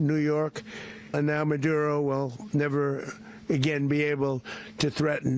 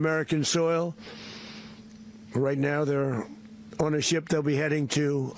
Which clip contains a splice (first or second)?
first